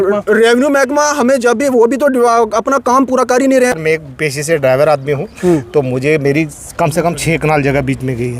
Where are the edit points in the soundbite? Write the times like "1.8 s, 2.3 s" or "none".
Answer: 3.7 s